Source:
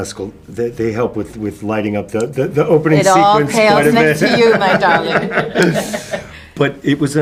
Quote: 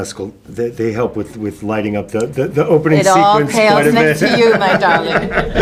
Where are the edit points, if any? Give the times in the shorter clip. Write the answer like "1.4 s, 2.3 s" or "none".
none